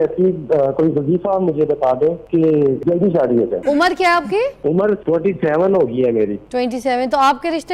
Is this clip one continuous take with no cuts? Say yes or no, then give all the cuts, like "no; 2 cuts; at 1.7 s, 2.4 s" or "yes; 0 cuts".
no; 4 cuts; at 2.6 s, 3.6 s, 4.9 s, 6.4 s